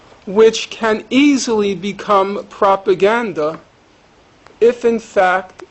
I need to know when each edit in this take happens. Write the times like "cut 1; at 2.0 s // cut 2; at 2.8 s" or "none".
cut 1; at 2.5 s